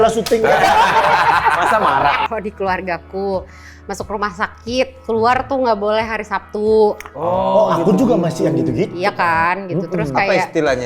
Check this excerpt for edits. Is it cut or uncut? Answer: cut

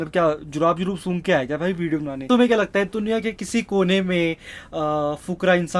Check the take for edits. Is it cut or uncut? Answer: cut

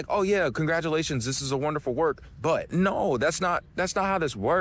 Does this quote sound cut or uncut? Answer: cut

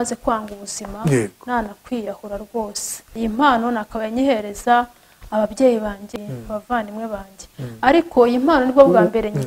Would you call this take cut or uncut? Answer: cut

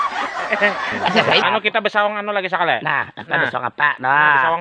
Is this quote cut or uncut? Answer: cut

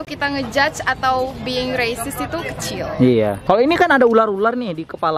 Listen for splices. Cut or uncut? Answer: cut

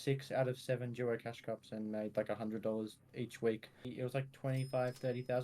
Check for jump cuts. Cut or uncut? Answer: cut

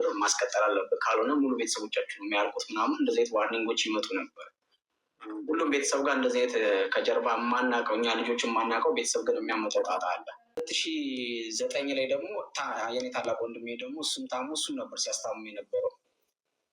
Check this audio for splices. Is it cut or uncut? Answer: cut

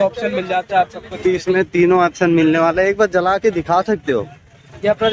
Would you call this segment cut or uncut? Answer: uncut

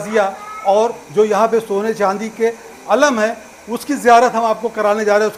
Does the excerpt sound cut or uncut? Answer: uncut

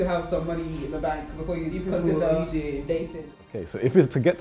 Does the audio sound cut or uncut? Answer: cut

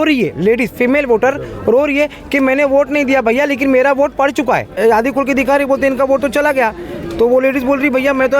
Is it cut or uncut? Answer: cut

